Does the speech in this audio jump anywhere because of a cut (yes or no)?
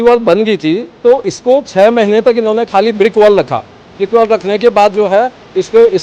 no